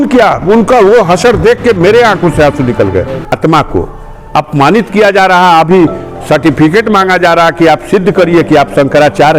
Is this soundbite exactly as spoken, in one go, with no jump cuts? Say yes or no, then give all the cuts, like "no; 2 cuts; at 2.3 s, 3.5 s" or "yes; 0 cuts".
no; 1 cut; at 3.4 s